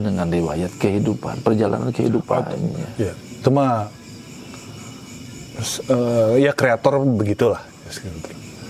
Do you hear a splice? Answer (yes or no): no